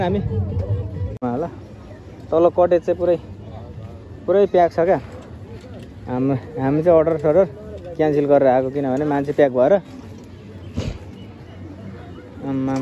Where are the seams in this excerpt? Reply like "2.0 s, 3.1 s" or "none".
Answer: 1.2 s